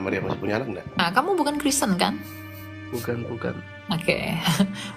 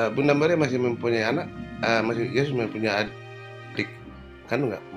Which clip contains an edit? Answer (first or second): first